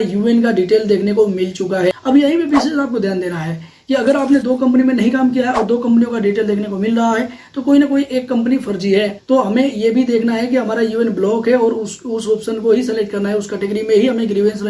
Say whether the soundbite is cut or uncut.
cut